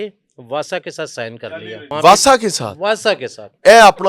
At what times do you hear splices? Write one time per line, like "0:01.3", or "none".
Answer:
0:01.5